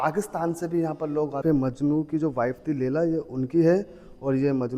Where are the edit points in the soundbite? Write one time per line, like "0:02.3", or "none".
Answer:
0:01.4